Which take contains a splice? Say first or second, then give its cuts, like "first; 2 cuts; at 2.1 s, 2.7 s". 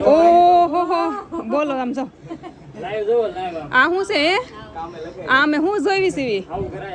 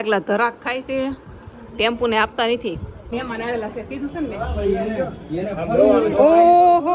second; 1 cut; at 3.1 s